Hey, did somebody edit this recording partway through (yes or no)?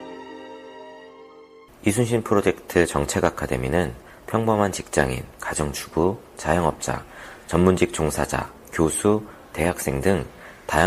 yes